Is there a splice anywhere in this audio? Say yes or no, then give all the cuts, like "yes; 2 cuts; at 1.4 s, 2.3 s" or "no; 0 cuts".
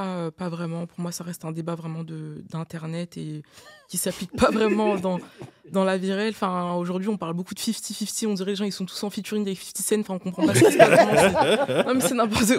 no; 0 cuts